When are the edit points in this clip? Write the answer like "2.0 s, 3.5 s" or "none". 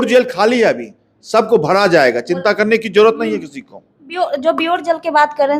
none